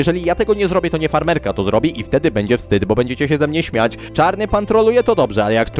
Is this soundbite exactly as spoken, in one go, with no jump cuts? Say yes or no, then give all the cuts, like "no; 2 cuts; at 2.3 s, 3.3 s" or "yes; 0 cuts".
no; 1 cut; at 4.0 s